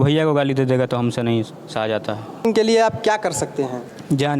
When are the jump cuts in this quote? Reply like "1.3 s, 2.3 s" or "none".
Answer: 2.5 s